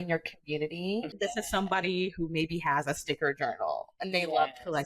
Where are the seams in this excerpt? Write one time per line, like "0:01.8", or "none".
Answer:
0:01.1